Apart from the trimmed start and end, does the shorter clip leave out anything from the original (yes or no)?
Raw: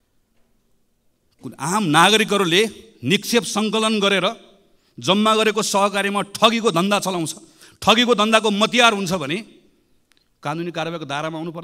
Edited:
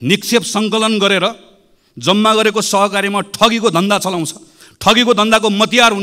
no